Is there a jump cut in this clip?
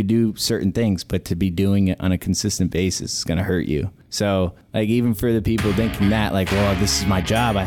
yes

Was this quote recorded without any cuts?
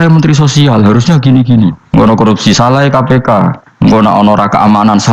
no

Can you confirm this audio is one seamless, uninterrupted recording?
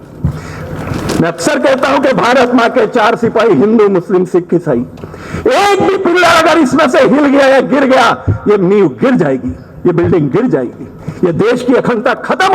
yes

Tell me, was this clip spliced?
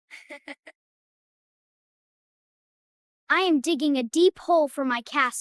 no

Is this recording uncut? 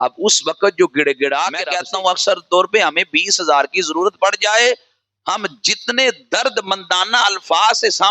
no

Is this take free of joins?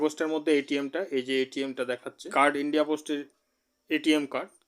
no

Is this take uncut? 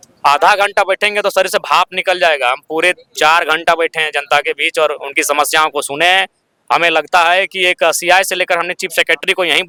yes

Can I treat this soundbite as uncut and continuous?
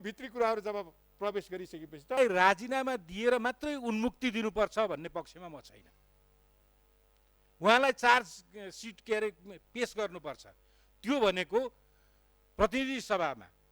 no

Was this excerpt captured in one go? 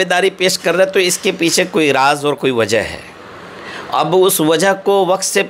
yes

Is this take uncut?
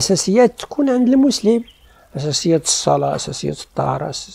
yes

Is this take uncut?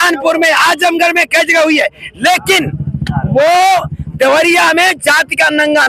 yes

